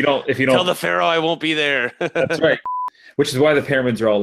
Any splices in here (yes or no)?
yes